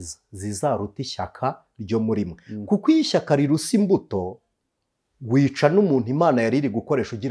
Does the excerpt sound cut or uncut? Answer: uncut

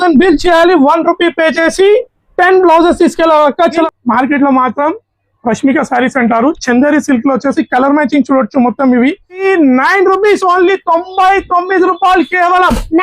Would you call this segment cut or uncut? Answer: cut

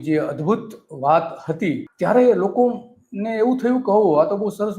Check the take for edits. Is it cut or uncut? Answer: cut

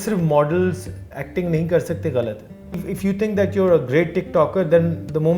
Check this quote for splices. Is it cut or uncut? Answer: cut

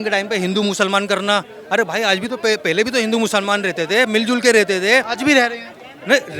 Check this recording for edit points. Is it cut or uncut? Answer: uncut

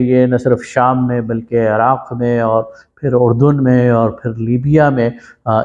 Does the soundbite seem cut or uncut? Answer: uncut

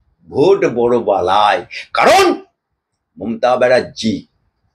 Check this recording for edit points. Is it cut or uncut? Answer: uncut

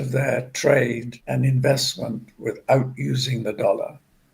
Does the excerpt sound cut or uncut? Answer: cut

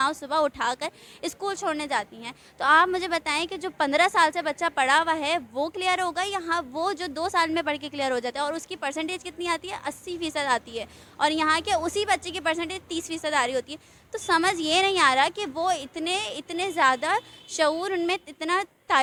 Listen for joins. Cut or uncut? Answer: uncut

